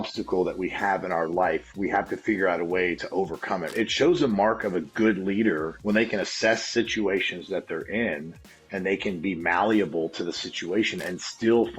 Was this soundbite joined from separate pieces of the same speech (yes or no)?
yes